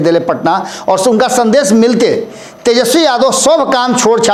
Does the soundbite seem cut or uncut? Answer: uncut